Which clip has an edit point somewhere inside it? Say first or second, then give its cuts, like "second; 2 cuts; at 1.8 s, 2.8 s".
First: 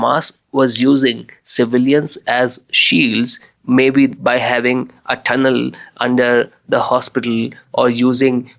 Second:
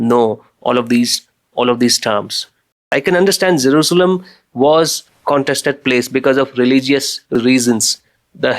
second; 2 cuts; at 2.9 s, 5.1 s